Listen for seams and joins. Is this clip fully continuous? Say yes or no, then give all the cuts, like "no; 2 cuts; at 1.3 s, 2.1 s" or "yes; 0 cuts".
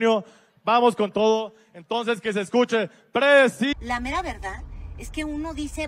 no; 1 cut; at 3.7 s